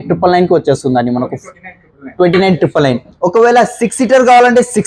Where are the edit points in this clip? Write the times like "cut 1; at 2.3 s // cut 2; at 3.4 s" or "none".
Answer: none